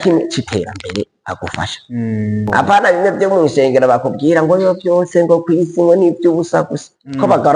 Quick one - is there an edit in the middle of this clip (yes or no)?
yes